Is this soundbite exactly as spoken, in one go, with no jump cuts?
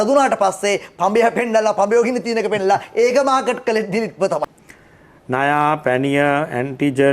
no; 1 cut; at 4.4 s

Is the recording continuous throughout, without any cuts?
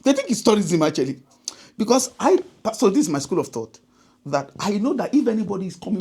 yes; 0 cuts

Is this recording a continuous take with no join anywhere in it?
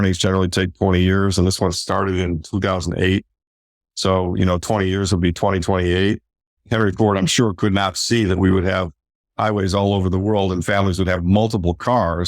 no; 1 cut; at 6.6 s

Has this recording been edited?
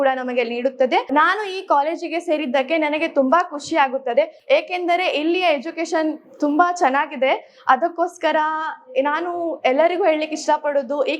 no; 0 cuts

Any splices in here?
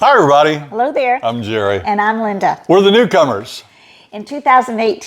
no; 0 cuts

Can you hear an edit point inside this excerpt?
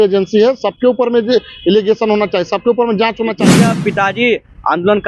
yes; 1 cut; at 3.5 s

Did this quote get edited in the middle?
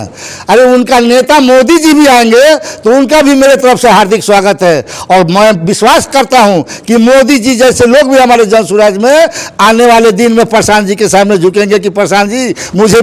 no; 0 cuts

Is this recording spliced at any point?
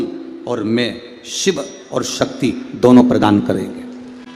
no; 0 cuts

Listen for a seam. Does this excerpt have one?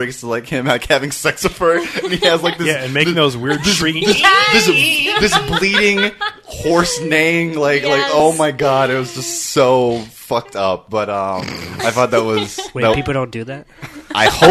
no; 0 cuts

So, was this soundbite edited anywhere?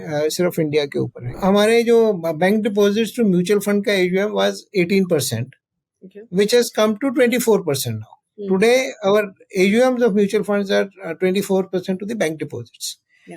yes; 1 cut; at 1.2 s

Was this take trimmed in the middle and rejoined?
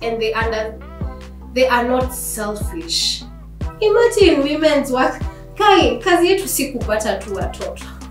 yes; 1 cut; at 3.6 s

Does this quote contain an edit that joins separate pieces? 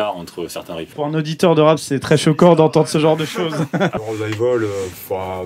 yes; 2 cuts; at 0.9 s, 4.0 s

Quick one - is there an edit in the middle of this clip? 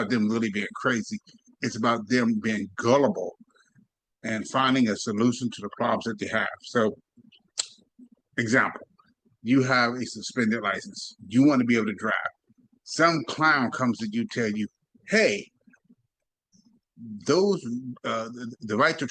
no; 0 cuts

